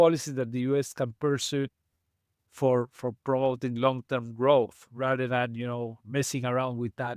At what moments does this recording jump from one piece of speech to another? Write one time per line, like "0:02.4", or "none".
none